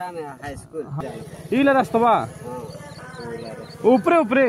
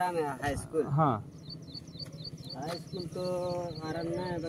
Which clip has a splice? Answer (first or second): first